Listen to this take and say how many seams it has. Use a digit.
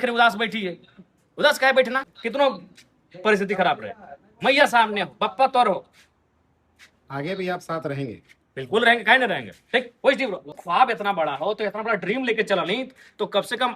2